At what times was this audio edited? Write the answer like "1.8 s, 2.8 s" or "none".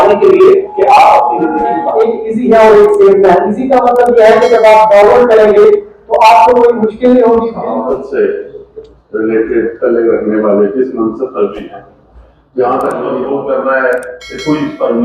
1.8 s, 7.6 s, 13.1 s

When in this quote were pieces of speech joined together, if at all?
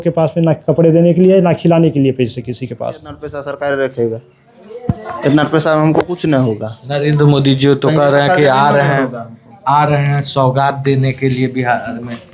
3.3 s

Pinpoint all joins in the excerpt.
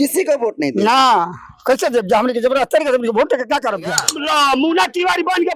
4.1 s

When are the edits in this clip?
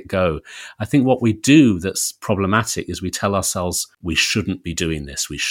3.9 s

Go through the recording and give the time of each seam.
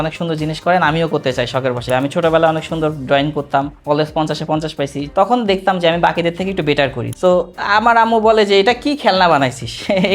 1.9 s, 5.1 s, 7.0 s

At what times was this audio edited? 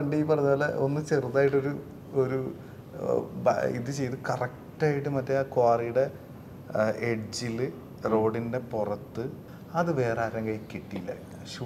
9.4 s

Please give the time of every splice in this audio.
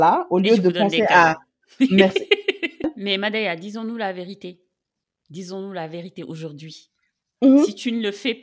2.8 s

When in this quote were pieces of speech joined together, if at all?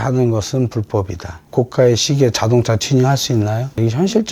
1.4 s

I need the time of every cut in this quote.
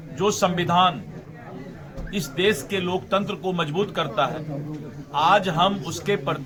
none

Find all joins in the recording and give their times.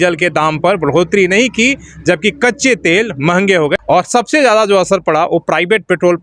3.8 s

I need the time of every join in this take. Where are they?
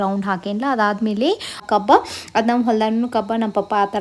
1.6 s

